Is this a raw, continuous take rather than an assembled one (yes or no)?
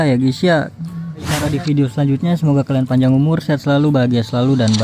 no